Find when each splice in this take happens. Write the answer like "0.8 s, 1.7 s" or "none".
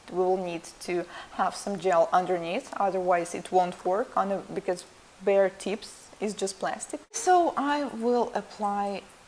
1.5 s